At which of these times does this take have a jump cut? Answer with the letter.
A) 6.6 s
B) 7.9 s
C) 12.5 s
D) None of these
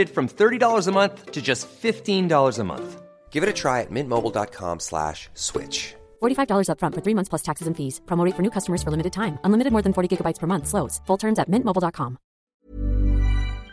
C